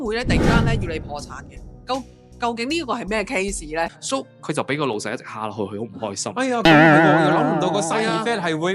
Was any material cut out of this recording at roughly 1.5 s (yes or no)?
no